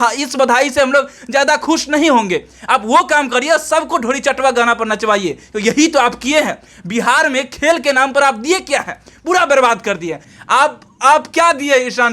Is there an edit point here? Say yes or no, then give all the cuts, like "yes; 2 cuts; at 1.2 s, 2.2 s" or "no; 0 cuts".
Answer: yes; 1 cut; at 10.3 s